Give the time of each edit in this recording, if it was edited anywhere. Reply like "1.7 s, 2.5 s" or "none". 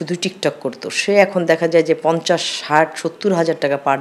none